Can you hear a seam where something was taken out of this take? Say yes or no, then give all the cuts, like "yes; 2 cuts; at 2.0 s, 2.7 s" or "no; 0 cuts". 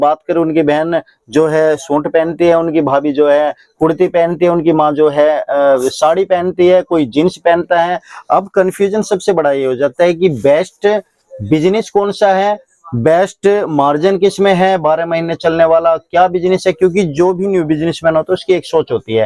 no; 0 cuts